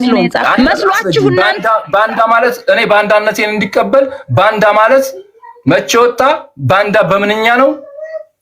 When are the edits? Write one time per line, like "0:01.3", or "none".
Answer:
0:01.5